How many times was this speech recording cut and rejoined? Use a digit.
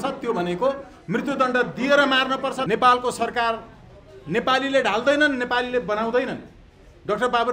1